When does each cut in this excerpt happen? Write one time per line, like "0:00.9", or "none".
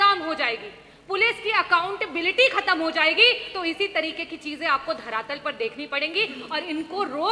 none